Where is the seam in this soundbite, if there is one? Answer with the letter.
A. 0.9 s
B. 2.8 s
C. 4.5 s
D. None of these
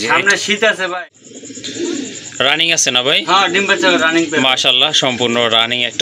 A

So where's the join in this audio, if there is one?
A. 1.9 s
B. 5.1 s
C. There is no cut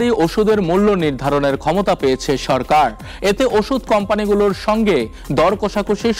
C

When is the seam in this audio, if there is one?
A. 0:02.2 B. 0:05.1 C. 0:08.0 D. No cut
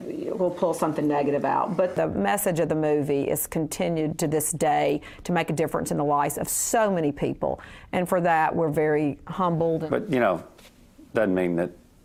D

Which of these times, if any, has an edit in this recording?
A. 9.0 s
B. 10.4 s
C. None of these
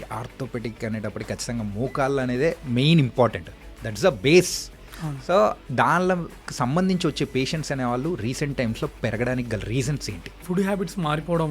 B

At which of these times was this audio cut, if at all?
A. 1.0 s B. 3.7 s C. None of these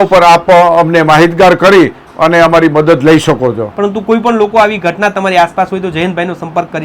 B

